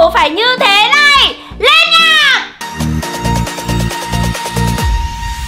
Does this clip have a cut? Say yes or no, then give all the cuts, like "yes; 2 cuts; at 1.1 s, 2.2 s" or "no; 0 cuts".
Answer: yes; 1 cut; at 2.6 s